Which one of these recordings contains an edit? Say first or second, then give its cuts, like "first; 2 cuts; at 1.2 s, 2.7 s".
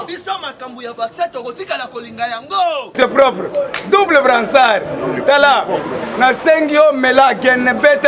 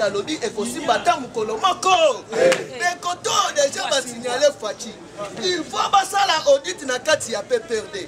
first; 1 cut; at 2.9 s